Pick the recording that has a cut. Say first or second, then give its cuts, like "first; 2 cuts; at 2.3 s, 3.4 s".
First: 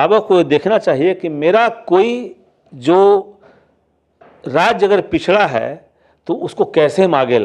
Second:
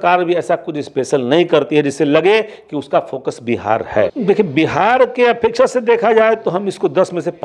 second; 1 cut; at 4.1 s